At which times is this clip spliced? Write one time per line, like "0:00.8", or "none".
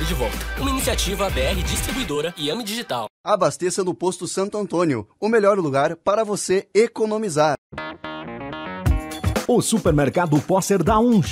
0:07.7

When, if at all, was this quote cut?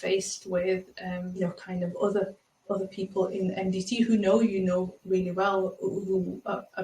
0:01.4

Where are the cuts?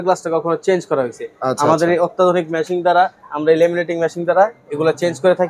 none

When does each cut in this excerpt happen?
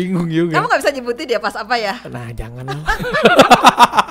none

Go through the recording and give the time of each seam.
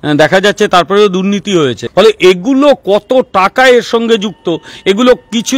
0:01.8

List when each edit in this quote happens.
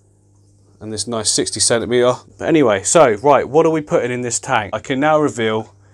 0:02.3
0:04.8

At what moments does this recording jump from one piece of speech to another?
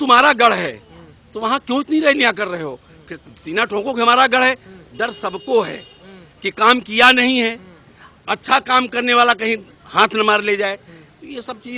none

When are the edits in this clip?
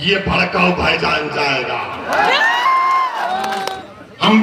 0:03.2

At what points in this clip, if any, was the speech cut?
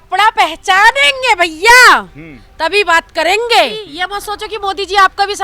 0:03.9

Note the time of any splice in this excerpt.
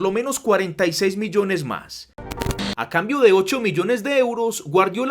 0:02.3

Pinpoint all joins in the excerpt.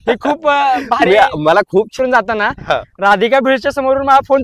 0:01.9

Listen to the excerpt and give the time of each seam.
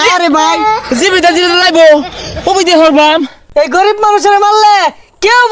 0:03.4

